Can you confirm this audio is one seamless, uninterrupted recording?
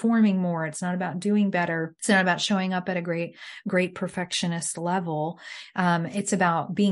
no; 1 cut; at 1.9 s

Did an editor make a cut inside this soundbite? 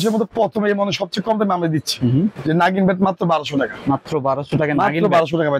no; 0 cuts

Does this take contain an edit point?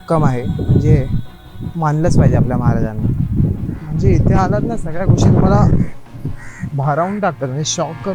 yes; 1 cut; at 3.7 s

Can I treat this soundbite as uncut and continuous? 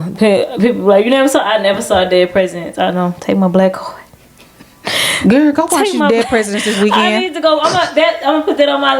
yes; 0 cuts

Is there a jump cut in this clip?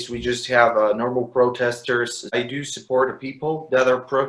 yes; 1 cut; at 2.3 s

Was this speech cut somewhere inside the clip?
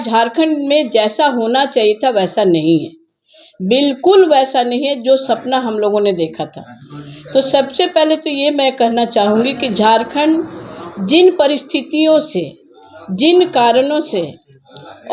no; 0 cuts

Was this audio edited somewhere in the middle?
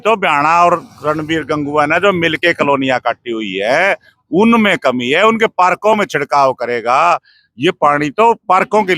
no; 0 cuts

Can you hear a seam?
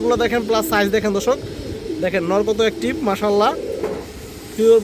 no; 0 cuts

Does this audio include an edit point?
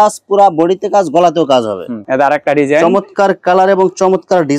yes; 1 cut; at 2.0 s

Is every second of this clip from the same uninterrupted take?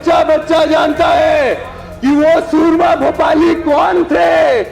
yes; 0 cuts

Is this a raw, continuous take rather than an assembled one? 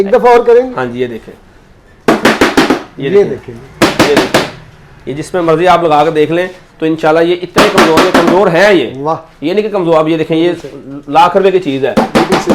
yes; 0 cuts

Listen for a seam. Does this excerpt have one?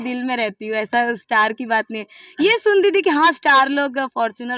no; 0 cuts

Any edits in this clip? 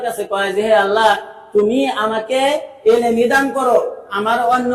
no; 0 cuts

